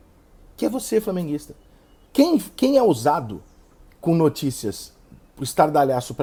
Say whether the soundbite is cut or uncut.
uncut